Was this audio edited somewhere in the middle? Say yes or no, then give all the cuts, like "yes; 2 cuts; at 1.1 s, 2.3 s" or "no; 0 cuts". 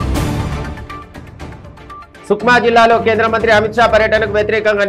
yes; 1 cut; at 1.0 s